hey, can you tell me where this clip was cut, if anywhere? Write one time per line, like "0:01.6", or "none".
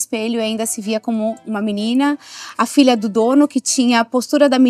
none